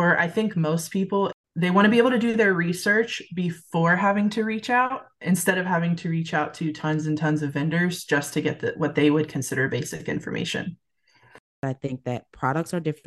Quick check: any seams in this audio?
yes; 2 cuts; at 1.4 s, 11.5 s

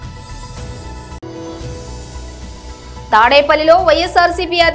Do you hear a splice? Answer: yes; 1 cut; at 0.9 s

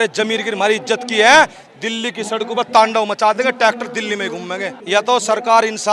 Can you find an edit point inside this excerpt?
yes; 1 cut; at 4.7 s

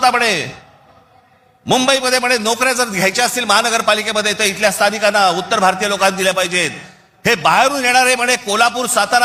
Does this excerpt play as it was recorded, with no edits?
yes; 0 cuts

